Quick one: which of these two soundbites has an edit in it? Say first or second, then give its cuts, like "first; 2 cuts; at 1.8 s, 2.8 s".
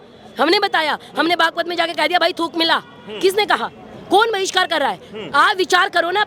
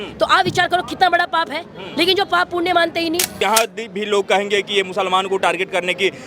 second; 1 cut; at 3.3 s